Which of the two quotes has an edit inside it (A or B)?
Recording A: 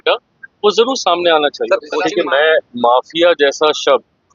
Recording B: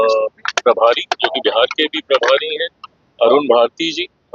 A